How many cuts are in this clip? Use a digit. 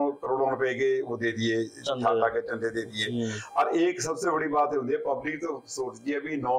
0